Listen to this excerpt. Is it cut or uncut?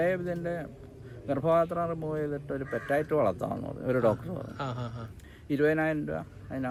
uncut